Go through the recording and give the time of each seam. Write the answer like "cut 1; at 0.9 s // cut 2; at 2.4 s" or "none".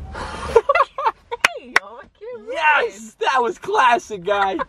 none

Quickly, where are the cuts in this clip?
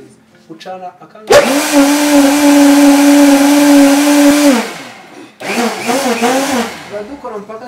cut 1; at 4.3 s

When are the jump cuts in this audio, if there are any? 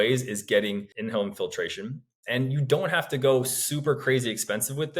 cut 1; at 0.9 s

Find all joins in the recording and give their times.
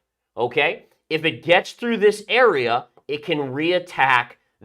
none

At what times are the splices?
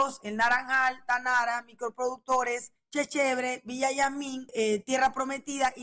cut 1; at 2.8 s // cut 2; at 4.5 s

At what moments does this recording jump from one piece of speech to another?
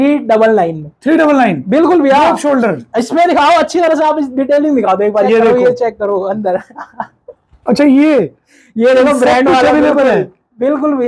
cut 1; at 5.2 s

